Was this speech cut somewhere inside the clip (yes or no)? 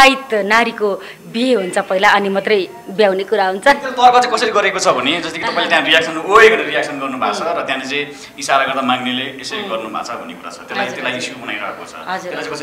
no